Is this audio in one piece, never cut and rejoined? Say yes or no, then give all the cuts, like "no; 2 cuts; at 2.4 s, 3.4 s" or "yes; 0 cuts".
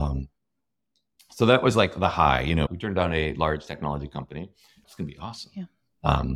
no; 1 cut; at 4.8 s